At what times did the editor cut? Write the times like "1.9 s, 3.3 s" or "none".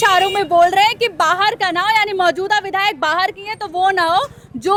none